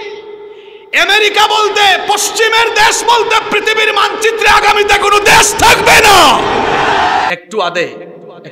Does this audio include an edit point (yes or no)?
yes